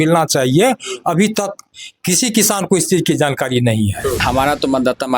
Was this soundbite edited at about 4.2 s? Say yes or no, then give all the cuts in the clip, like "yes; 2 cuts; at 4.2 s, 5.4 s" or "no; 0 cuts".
yes; 1 cut; at 4.2 s